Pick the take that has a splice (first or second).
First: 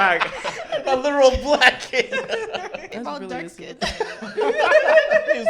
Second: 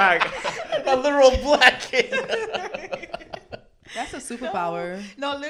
first